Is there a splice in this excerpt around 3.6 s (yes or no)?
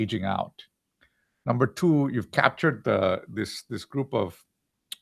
yes